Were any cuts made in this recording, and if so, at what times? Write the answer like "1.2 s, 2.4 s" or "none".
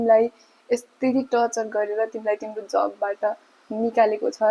none